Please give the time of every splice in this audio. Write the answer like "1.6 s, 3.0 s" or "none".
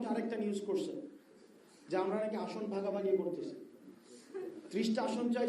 none